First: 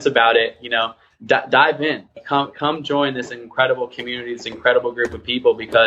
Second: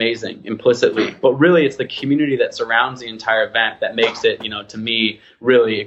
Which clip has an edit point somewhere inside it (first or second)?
first